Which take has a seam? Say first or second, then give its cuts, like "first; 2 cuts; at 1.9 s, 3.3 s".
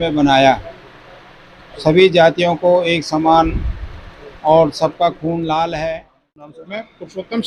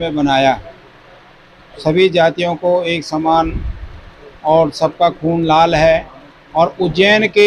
first; 1 cut; at 6.5 s